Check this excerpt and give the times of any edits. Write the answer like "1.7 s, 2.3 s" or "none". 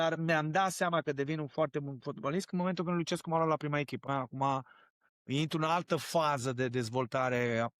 4.1 s